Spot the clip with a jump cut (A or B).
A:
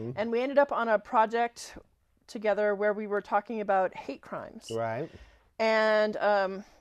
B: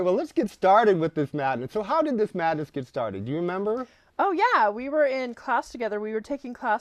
B